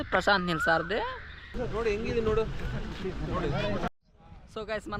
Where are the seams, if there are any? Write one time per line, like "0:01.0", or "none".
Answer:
0:01.7